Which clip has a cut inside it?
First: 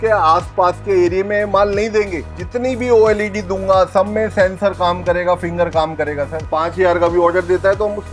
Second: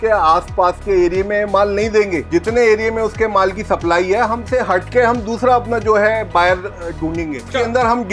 first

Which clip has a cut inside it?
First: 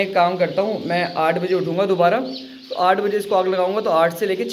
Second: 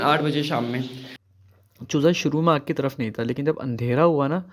second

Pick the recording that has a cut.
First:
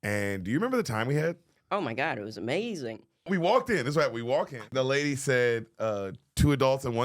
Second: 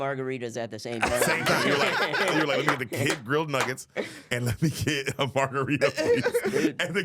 first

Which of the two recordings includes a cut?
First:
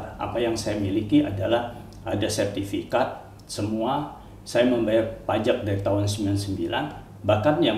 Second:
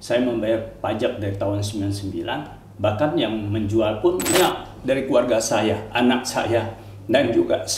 second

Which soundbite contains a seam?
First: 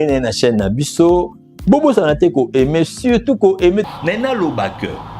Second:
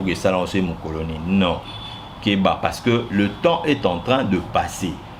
first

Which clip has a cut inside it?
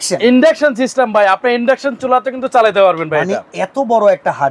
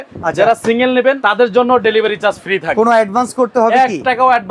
second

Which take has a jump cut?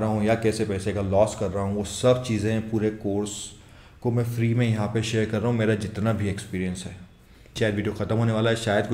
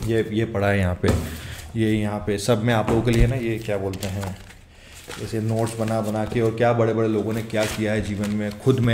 first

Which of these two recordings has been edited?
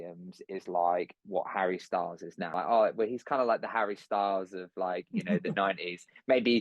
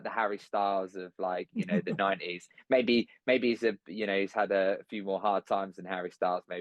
first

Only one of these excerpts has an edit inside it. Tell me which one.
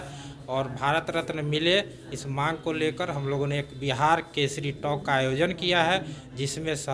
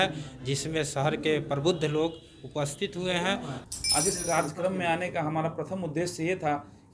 second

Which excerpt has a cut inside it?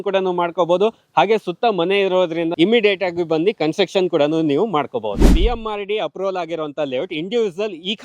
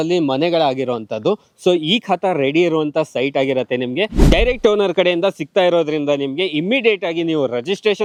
first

